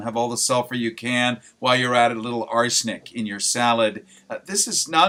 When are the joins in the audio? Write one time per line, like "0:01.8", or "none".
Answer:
none